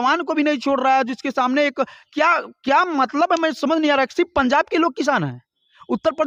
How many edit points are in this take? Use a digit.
0